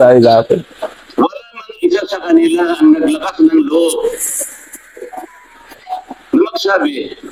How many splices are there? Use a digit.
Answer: 0